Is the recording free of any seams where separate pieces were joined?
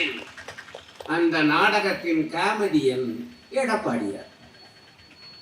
yes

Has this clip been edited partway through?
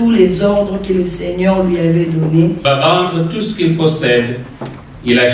yes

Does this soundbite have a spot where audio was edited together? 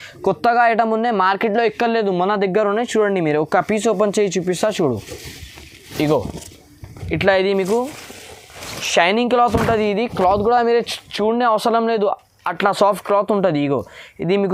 no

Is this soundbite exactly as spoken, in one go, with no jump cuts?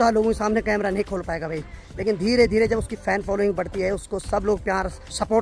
yes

